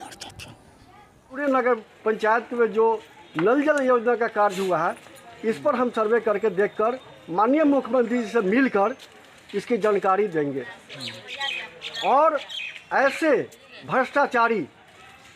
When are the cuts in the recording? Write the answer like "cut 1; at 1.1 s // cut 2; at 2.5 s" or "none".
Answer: cut 1; at 1.4 s